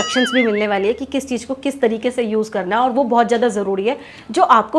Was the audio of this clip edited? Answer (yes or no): no